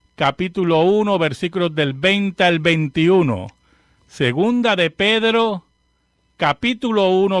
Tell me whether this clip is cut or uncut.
cut